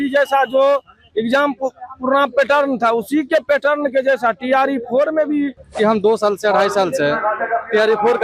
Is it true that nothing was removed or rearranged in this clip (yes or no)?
no